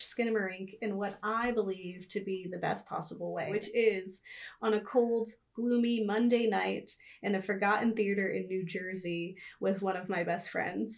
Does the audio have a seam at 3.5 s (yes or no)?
yes